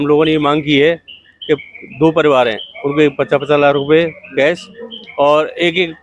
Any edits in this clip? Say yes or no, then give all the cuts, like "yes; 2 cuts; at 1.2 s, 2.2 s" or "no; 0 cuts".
no; 0 cuts